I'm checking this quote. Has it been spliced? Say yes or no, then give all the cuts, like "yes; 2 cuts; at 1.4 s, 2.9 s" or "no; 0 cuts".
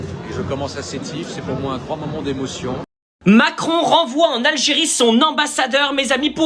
yes; 1 cut; at 2.9 s